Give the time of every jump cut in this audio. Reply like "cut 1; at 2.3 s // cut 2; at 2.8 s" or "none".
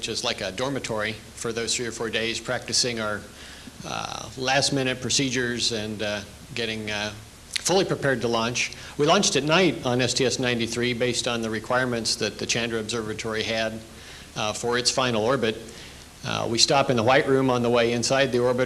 cut 1; at 13.1 s